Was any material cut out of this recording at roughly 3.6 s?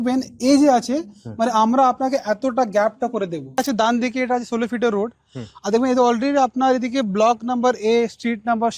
yes; 1 cut; at 3.6 s

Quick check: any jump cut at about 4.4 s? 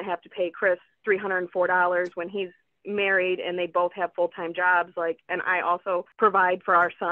no; 1 cut; at 6.1 s

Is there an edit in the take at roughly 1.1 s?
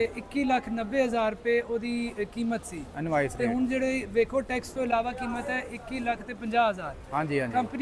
no; 0 cuts

